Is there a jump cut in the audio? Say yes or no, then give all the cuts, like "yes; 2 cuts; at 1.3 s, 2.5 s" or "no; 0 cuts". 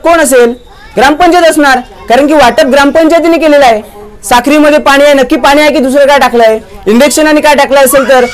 no; 0 cuts